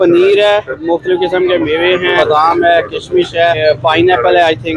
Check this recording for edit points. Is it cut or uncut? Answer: cut